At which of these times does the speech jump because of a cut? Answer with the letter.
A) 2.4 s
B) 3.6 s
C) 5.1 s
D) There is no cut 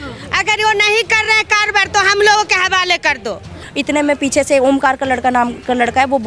B